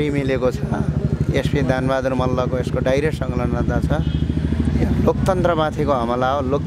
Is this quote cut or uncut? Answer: uncut